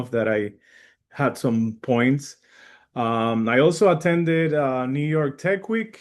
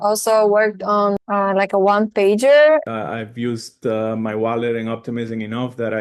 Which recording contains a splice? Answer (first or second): second